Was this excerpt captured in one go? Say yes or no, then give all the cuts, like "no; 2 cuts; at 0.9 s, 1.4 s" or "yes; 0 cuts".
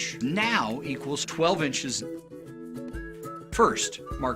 no; 1 cut; at 3.0 s